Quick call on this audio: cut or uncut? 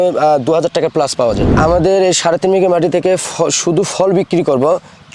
cut